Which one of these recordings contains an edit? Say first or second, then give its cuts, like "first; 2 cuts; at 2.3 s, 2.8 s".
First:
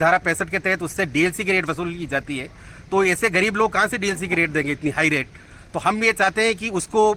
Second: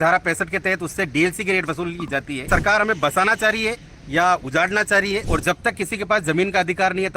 second; 2 cuts; at 2.4 s, 5.3 s